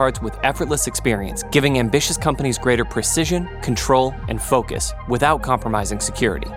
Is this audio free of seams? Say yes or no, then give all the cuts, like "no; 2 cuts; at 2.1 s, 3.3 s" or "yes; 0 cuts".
yes; 0 cuts